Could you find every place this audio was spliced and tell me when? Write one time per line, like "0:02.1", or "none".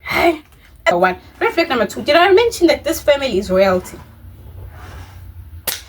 0:00.9